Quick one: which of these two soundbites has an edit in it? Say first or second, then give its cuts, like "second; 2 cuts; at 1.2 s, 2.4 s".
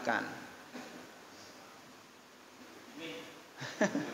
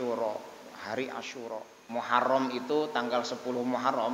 second; 1 cut; at 1.7 s